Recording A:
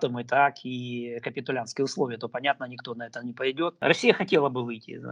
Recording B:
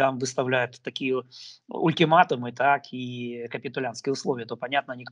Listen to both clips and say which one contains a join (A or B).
A